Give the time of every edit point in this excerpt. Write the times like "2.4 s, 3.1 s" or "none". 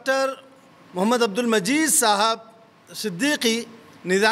none